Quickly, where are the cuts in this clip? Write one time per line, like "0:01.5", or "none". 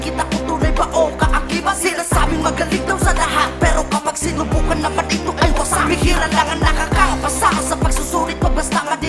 none